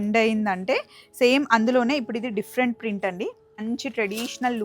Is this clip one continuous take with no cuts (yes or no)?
no